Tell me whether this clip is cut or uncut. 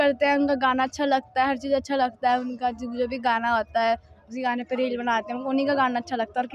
uncut